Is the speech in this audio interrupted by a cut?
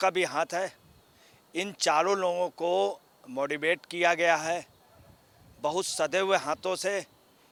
no; 0 cuts

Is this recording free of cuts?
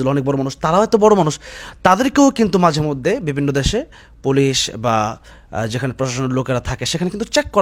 yes; 0 cuts

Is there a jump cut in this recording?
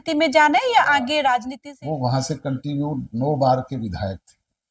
yes; 1 cut; at 1.6 s

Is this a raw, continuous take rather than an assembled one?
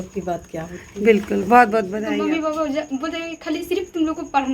no; 1 cut; at 2.0 s

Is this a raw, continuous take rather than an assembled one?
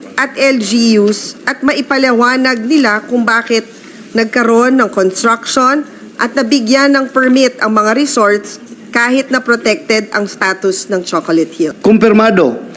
no; 1 cut; at 11.7 s

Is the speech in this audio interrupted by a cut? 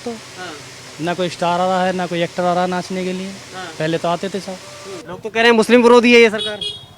yes; 1 cut; at 4.9 s

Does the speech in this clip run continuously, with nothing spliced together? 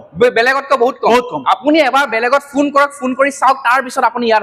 yes; 0 cuts

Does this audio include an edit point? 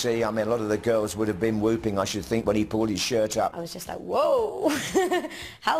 no; 0 cuts

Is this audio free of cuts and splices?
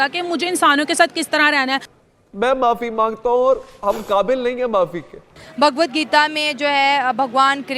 no; 2 cuts; at 1.9 s, 5.4 s

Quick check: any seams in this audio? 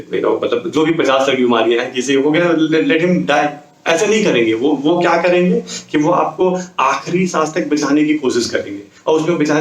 no; 0 cuts

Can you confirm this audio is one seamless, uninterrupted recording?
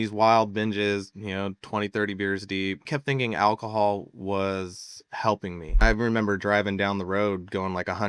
no; 2 cuts; at 2.9 s, 5.8 s

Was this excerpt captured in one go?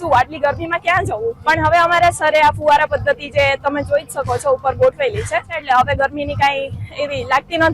no; 2 cuts; at 1.4 s, 5.5 s

